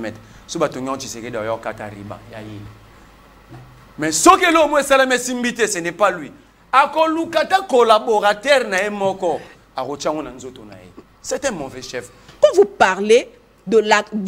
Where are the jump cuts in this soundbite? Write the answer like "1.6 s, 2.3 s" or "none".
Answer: 12.2 s